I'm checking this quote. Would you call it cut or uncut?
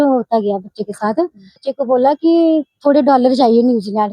cut